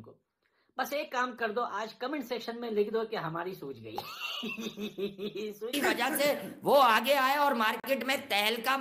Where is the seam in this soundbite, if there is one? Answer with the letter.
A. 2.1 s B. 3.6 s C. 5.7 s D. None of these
C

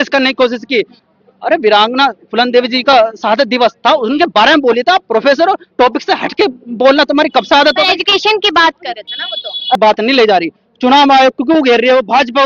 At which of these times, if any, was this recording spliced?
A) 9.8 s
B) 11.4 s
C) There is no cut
A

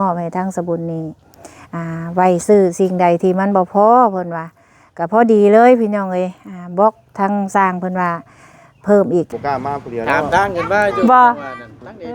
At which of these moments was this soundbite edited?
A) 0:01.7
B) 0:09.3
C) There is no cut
B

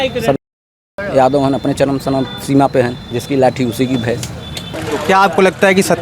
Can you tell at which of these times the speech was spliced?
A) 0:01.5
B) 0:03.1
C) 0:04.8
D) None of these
C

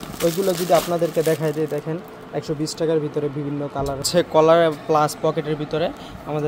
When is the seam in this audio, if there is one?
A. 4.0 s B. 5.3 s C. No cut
A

